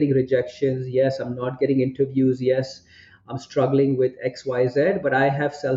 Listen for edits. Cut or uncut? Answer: uncut